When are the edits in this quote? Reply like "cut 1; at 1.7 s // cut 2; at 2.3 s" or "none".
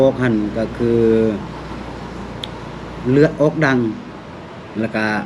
none